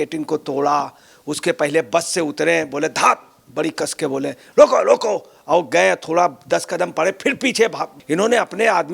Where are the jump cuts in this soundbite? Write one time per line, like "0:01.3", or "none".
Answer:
0:07.9